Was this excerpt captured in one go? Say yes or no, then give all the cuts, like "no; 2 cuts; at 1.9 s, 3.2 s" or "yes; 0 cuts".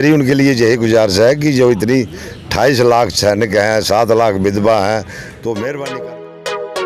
no; 1 cut; at 5.9 s